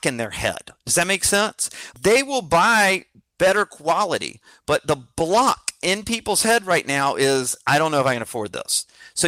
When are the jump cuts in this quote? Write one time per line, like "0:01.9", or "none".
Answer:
0:01.9